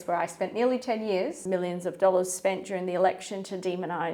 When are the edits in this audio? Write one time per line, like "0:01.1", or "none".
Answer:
0:01.4